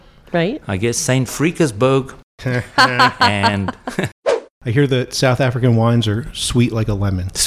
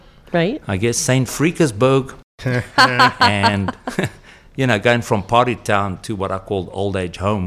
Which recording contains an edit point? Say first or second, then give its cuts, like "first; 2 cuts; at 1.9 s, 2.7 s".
first; 1 cut; at 4.5 s